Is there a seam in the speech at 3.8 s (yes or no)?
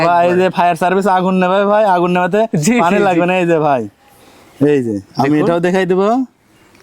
no